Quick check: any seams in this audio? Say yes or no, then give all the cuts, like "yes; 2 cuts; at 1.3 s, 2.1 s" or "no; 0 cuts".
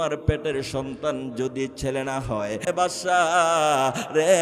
yes; 1 cut; at 2.6 s